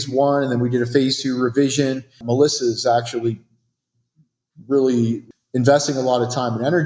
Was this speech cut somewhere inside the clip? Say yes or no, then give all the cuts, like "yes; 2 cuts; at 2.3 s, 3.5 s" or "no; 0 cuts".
yes; 2 cuts; at 2.2 s, 5.2 s